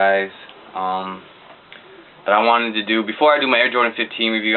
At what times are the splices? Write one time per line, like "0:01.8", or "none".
0:02.7